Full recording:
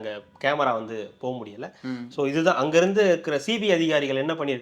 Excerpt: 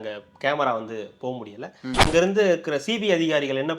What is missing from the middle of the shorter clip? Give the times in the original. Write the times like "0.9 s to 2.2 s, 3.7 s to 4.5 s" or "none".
2.1 s to 2.7 s